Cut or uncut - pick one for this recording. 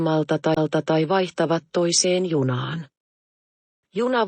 cut